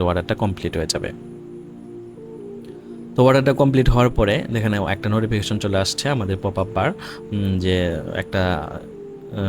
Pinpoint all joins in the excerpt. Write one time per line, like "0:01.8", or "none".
0:01.1
0:03.2